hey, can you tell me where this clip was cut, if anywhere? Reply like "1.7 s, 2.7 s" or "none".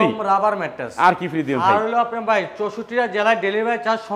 none